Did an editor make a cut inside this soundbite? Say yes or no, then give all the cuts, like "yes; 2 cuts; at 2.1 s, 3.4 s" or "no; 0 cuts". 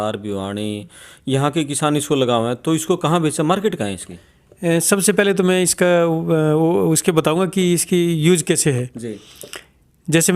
no; 0 cuts